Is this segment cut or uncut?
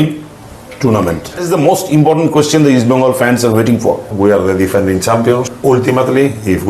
cut